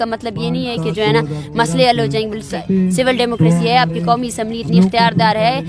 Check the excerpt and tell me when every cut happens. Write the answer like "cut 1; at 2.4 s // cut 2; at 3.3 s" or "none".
cut 1; at 2.6 s